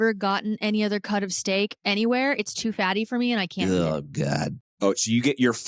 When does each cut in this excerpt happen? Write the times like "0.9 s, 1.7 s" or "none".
4.7 s